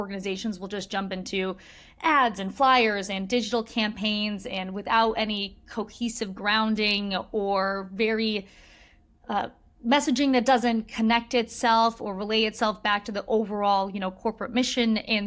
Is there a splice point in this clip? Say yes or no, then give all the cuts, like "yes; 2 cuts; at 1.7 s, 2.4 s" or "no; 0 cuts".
no; 0 cuts